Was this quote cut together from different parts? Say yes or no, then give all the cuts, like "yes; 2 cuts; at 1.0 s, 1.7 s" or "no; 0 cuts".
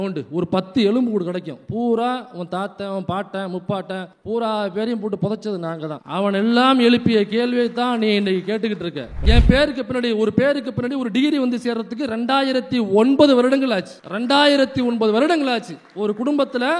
yes; 1 cut; at 9.2 s